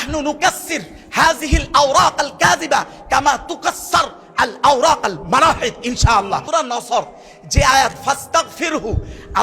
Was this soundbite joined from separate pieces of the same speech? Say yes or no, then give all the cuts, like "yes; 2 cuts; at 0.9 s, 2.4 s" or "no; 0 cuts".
yes; 1 cut; at 6.4 s